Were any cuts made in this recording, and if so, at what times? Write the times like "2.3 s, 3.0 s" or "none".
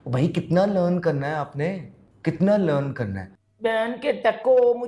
3.3 s